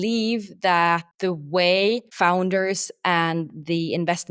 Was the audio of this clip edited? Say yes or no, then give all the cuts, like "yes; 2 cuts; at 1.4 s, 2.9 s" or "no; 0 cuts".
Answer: yes; 2 cuts; at 1.1 s, 2.1 s